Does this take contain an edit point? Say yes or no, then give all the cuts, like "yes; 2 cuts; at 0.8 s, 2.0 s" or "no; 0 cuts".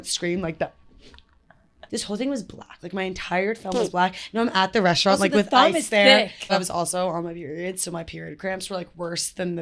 yes; 2 cuts; at 1.9 s, 6.5 s